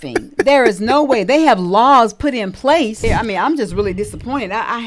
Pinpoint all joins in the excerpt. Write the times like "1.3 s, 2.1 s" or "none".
3.0 s